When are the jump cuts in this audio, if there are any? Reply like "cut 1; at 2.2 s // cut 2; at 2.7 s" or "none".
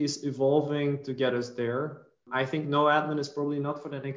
cut 1; at 2.3 s